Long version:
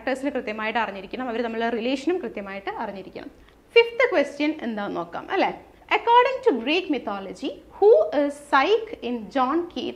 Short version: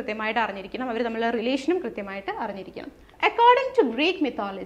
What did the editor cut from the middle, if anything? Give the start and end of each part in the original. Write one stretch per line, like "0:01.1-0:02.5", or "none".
0:03.4-0:05.7